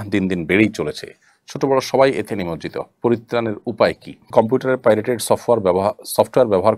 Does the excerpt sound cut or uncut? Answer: cut